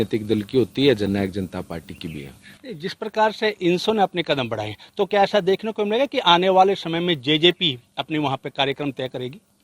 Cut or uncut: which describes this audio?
uncut